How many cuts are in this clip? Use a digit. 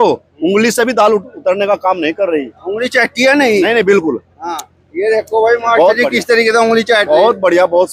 0